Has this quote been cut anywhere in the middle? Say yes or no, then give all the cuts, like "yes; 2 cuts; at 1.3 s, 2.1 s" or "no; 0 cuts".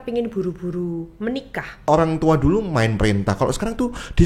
yes; 1 cut; at 1.9 s